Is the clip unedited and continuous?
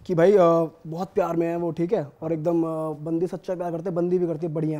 yes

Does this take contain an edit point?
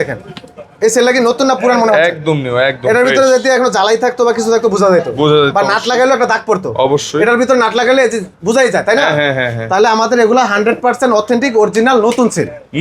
no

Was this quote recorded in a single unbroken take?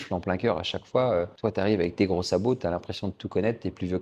yes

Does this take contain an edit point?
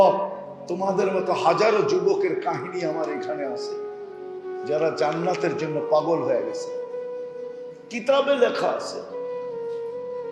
yes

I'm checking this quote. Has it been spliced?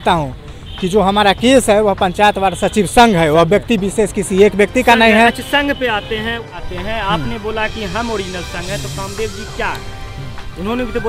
yes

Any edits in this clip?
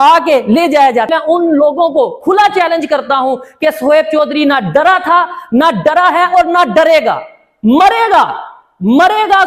yes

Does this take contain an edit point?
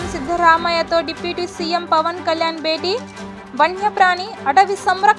no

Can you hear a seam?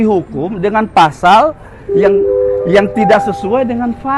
no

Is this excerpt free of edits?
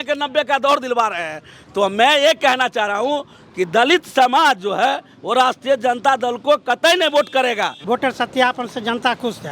no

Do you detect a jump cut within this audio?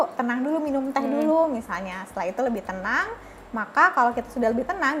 no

